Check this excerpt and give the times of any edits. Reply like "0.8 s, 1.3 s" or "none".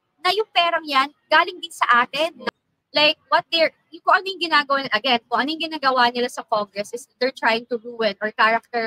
2.5 s